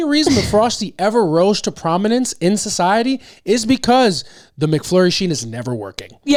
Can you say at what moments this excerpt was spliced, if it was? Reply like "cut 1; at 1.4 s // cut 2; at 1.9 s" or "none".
none